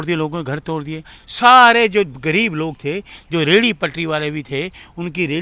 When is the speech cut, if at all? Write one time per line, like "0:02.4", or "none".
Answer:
0:01.2